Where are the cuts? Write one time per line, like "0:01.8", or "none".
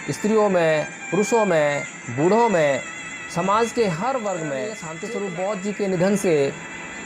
0:04.8